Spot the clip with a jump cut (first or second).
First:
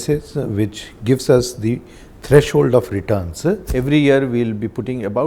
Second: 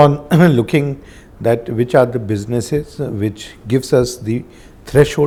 first